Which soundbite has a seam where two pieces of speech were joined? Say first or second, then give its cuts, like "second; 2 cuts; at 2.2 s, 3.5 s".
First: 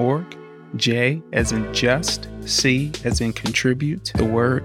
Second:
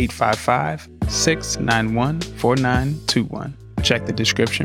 second; 1 cut; at 3.7 s